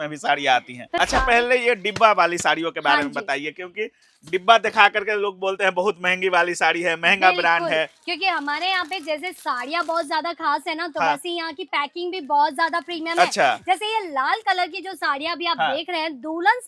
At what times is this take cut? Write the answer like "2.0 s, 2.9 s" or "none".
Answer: 0.9 s